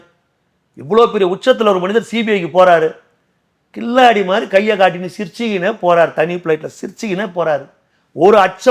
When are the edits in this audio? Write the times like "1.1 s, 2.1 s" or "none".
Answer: none